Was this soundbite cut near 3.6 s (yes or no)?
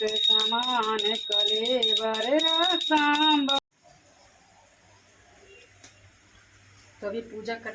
yes